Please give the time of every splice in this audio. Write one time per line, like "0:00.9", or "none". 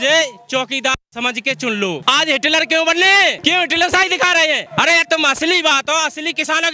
0:02.0
0:03.4
0:04.7